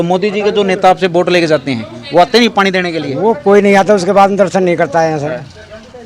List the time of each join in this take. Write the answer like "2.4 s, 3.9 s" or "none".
none